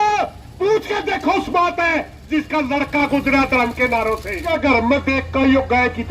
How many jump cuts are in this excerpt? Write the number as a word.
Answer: one